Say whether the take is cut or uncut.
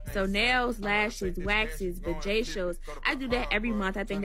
uncut